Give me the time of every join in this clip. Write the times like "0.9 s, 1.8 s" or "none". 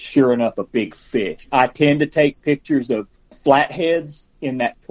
1.5 s, 3.4 s